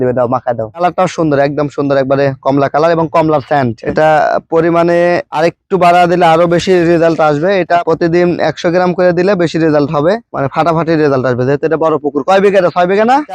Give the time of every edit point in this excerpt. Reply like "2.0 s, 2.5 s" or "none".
none